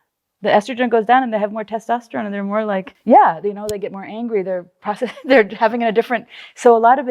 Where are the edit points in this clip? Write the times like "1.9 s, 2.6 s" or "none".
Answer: 2.9 s